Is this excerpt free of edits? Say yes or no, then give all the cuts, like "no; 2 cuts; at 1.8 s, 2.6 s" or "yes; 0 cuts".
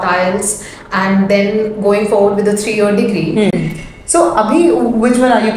no; 1 cut; at 3.5 s